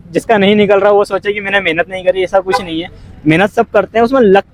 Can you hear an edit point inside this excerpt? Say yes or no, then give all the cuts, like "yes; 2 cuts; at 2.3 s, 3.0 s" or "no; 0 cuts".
no; 0 cuts